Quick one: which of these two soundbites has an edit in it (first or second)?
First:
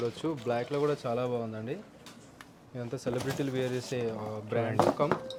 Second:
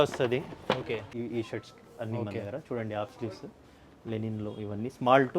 second